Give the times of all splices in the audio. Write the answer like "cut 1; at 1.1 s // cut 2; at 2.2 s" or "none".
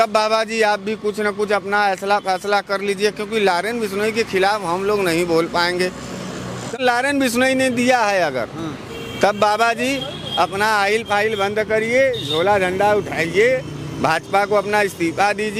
cut 1; at 6.8 s